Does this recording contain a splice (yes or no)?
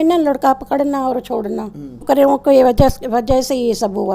yes